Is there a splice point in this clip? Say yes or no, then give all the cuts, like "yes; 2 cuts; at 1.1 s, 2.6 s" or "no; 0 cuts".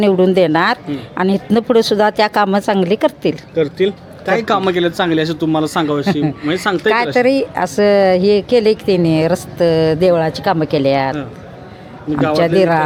no; 0 cuts